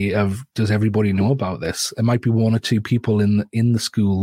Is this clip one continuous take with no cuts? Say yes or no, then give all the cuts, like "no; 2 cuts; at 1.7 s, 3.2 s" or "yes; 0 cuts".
yes; 0 cuts